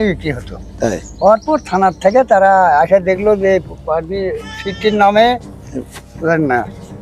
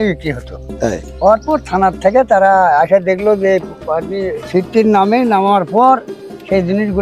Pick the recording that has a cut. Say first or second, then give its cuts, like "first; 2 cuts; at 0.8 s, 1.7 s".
second; 1 cut; at 4.4 s